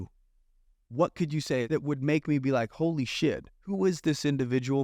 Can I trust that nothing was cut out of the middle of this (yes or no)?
no